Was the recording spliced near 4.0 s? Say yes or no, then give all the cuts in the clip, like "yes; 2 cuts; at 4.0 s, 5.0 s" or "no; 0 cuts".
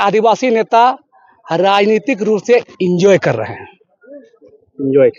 no; 0 cuts